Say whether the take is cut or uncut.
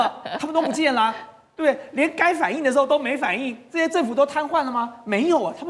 uncut